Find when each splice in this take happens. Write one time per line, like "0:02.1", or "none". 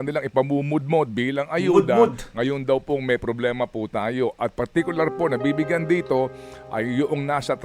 none